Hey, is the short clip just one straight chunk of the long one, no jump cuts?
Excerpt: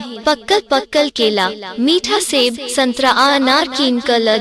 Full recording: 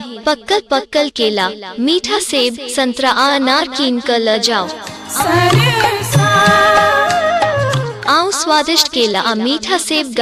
yes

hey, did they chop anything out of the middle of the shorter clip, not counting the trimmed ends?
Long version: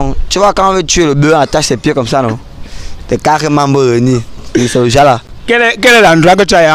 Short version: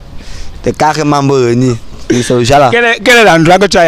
yes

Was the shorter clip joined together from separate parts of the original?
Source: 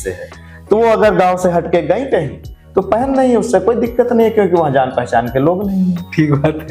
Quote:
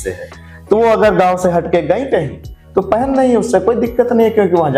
no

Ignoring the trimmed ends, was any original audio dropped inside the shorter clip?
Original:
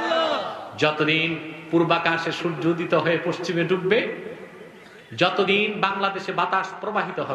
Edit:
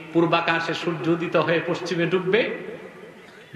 no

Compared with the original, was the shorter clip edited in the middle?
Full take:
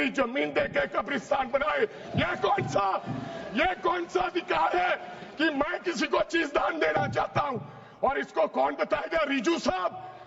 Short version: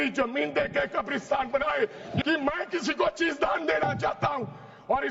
yes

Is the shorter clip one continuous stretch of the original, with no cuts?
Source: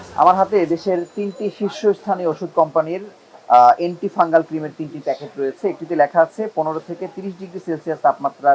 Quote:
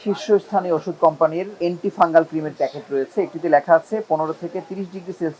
no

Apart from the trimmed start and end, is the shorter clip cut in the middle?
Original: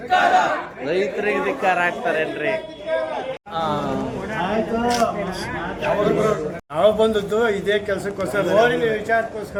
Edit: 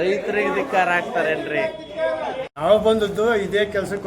yes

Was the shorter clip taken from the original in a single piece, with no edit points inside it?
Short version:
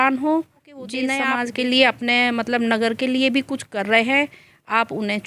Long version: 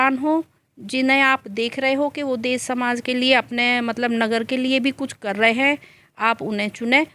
no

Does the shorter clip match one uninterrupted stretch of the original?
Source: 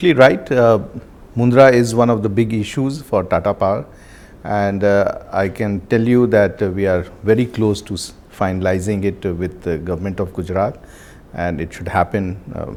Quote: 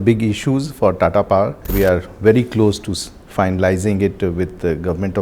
no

